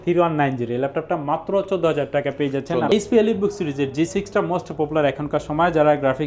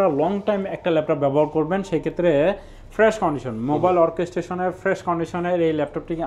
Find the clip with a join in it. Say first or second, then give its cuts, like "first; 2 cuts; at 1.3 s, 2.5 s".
first; 1 cut; at 2.9 s